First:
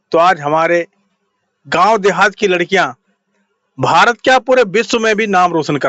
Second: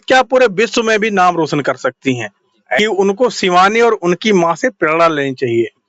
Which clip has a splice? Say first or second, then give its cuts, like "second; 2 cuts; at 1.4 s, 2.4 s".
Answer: second; 1 cut; at 2.8 s